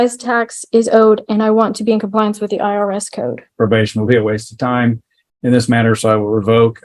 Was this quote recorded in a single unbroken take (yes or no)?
no